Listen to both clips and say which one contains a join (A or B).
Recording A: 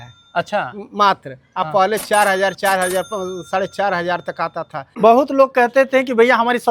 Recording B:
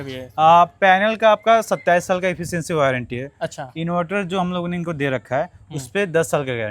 A